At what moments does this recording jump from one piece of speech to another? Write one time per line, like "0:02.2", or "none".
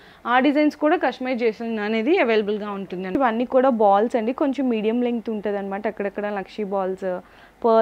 0:03.2